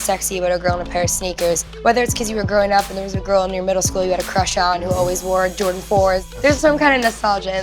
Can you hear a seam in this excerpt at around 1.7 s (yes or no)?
yes